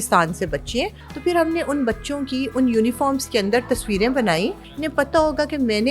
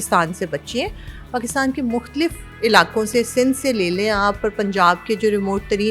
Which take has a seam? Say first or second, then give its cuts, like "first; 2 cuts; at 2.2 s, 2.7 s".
first; 2 cuts; at 1.0 s, 4.7 s